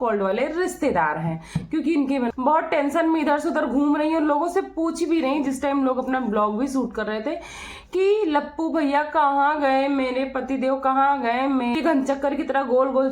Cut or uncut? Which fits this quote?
cut